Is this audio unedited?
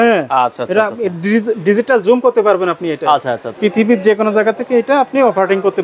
no; 1 cut; at 3.4 s

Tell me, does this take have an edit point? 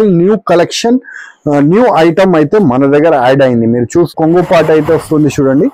yes; 1 cut; at 4.1 s

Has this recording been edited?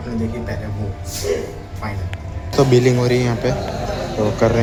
no; 0 cuts

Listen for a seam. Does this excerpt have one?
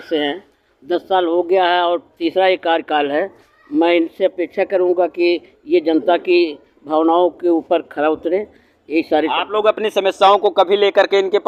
no; 0 cuts

